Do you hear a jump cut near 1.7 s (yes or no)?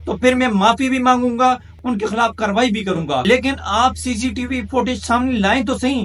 yes